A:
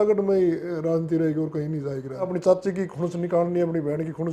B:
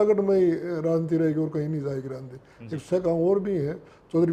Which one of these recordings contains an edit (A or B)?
A